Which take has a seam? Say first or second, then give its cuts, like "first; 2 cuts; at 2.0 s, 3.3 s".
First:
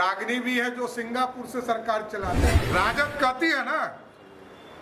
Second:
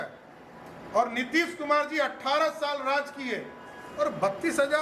first; 1 cut; at 2.5 s